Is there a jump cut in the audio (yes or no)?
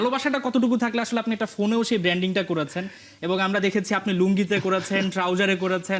no